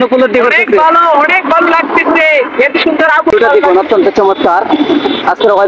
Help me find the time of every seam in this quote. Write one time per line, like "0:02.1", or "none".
0:03.3

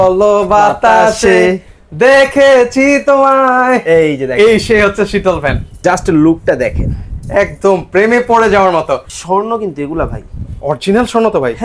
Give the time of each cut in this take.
0:05.8
0:09.1

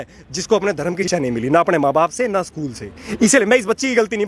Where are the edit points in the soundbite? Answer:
0:01.1

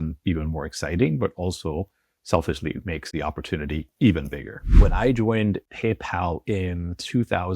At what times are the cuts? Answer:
0:03.1
0:04.8

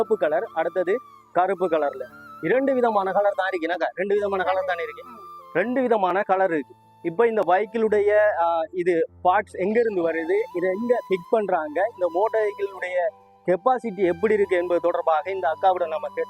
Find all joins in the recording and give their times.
none

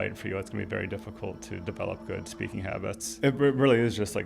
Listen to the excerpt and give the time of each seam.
0:03.2

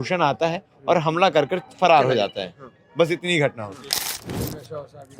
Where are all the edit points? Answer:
0:04.1

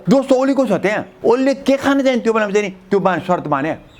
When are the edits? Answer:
0:01.1

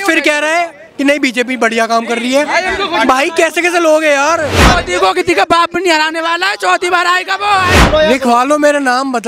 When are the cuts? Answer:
0:04.6
0:07.8

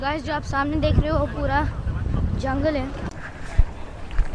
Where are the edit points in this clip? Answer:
none

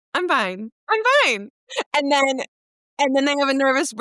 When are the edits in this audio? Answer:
none

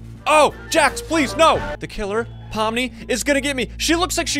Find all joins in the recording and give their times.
0:01.8

